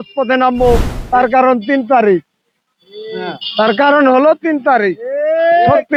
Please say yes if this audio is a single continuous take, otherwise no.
yes